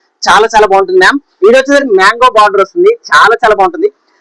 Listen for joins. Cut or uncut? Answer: cut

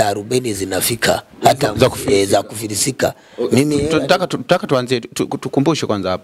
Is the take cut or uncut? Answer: uncut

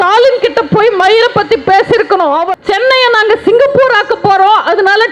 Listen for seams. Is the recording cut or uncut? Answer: cut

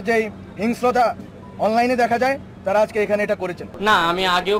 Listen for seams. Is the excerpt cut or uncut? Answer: cut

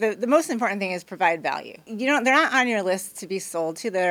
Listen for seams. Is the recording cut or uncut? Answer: cut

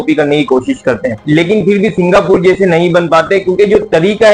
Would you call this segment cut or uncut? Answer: uncut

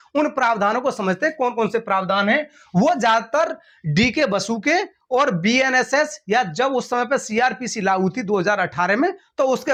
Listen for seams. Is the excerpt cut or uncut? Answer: uncut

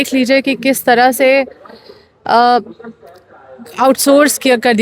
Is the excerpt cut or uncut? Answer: uncut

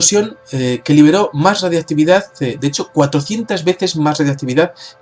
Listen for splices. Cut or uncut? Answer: cut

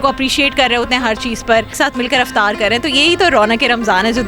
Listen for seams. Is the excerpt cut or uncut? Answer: cut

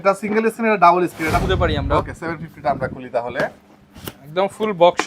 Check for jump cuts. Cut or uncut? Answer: cut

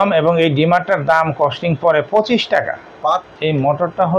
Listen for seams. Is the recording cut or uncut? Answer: cut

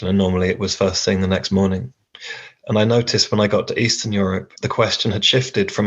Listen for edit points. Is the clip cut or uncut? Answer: cut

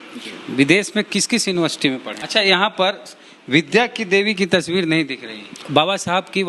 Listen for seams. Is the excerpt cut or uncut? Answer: cut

